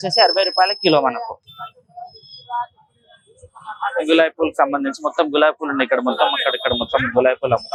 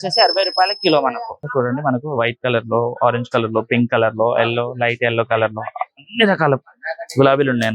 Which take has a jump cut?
second; 1 cut; at 1.5 s

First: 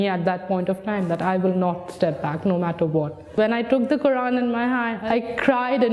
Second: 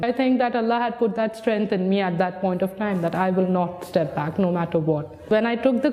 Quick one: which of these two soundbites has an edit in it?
first; 1 cut; at 5.0 s

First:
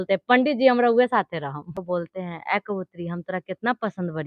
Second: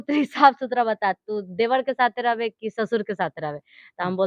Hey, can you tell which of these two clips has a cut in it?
first; 1 cut; at 1.7 s

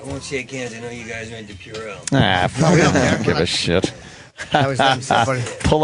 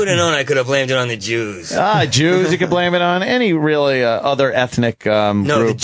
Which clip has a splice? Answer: first; 1 cut; at 1.5 s

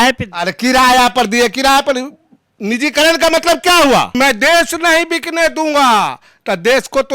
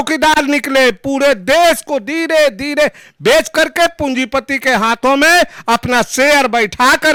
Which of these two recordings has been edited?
first; 1 cut; at 4.1 s

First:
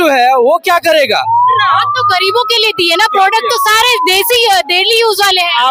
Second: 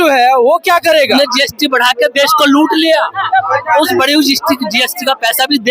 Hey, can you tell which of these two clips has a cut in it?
second; 1 cut; at 1.1 s

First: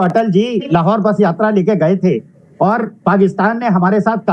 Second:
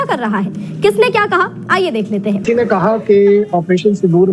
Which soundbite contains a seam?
second; 1 cut; at 2.4 s

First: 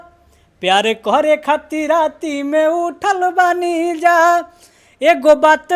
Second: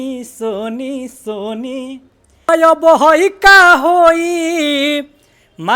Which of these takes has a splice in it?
second; 1 cut; at 2.5 s

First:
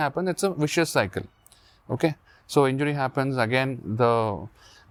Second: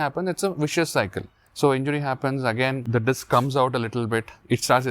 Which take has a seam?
second; 2 cuts; at 1.4 s, 2.8 s

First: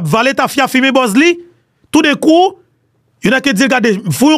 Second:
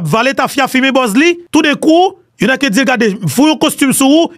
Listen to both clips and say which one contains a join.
second; 2 cuts; at 1.4 s, 2.2 s

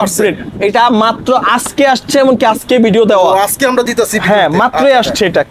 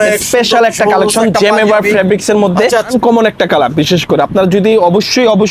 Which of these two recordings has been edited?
second; 1 cut; at 2.9 s

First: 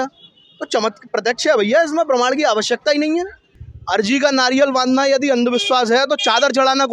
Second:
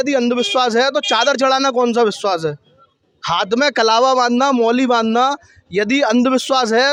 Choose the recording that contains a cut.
first; 1 cut; at 3.5 s

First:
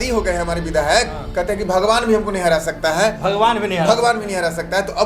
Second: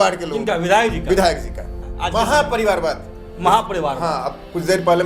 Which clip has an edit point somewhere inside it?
second; 1 cut; at 1.7 s

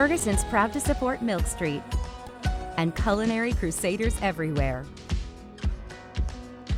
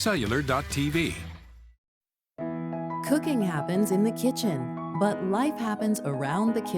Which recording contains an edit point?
second; 1 cut; at 1.4 s

